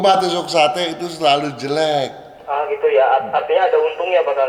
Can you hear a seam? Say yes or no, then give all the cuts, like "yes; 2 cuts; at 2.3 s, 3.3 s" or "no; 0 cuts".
no; 0 cuts